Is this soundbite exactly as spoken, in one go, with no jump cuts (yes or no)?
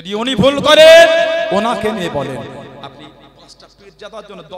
yes